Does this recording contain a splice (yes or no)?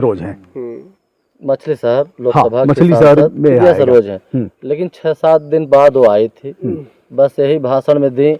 no